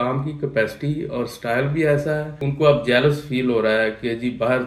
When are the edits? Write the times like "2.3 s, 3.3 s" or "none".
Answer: 2.4 s